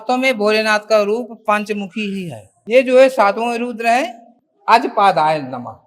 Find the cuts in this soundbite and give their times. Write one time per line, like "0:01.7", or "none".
0:02.5

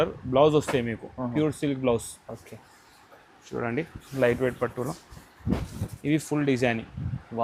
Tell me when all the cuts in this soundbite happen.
none

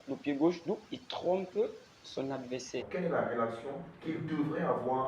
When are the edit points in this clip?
0:02.9

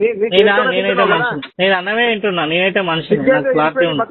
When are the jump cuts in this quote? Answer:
0:01.4

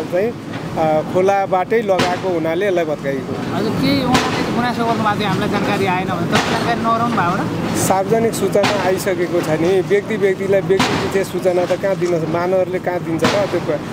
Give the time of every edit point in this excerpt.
none

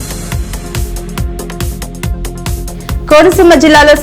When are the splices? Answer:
0:01.6

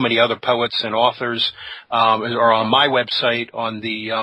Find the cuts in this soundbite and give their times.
none

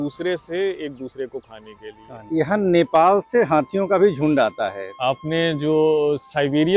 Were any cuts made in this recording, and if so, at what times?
0:02.2
0:04.8

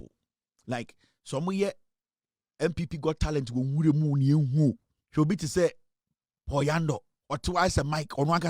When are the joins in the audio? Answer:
0:04.9
0:07.1

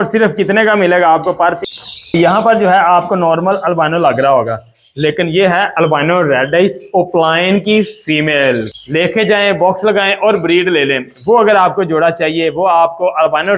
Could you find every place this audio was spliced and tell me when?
0:01.7
0:08.8

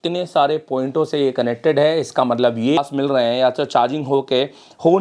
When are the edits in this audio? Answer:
0:02.8

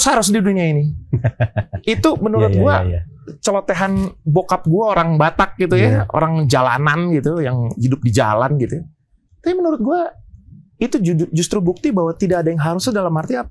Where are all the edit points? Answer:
none

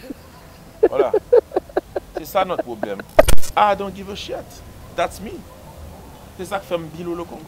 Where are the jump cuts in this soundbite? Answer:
0:03.3

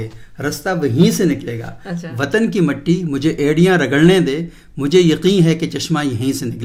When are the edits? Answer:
none

